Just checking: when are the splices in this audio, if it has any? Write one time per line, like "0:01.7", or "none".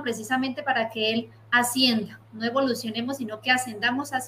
none